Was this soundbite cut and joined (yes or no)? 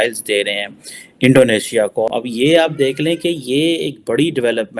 yes